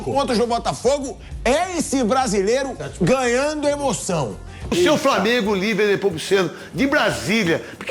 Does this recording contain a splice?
yes; 1 cut; at 4.6 s

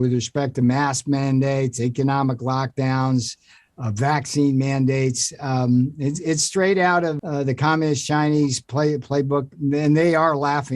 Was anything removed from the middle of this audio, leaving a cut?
yes; 1 cut; at 7.2 s

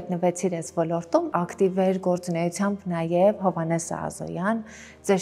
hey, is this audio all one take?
no; 1 cut; at 1.3 s

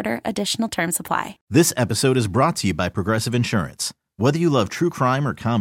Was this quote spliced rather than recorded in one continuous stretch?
yes; 1 cut; at 1.4 s

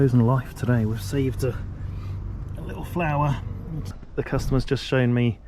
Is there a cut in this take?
yes; 1 cut; at 4.0 s

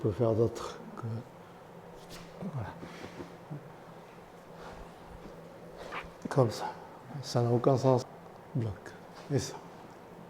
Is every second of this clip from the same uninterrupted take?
no; 1 cut; at 8.1 s

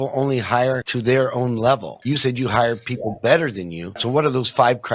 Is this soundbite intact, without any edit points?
no; 3 cuts; at 0.9 s, 1.9 s, 4.0 s

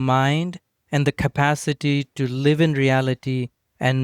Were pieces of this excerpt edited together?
no; 0 cuts

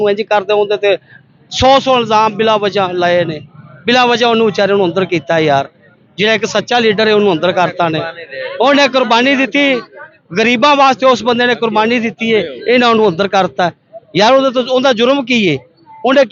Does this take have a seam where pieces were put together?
no; 0 cuts

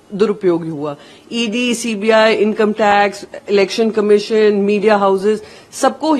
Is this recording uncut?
yes; 0 cuts

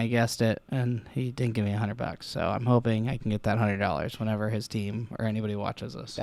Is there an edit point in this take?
no; 0 cuts

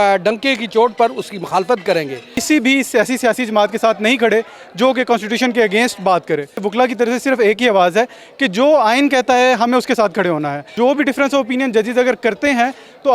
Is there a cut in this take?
yes; 3 cuts; at 2.4 s, 6.7 s, 10.7 s

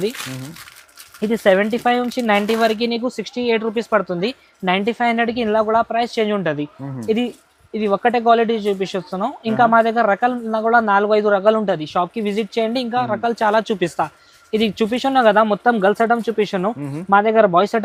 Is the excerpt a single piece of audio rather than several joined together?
yes; 0 cuts

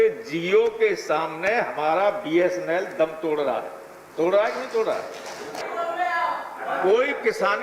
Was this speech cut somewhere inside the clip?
yes; 1 cut; at 5.6 s

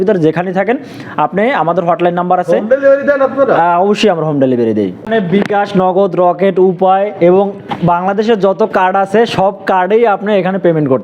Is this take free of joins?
no; 1 cut; at 5.0 s

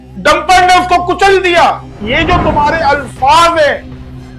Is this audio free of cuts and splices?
no; 1 cut; at 2.0 s

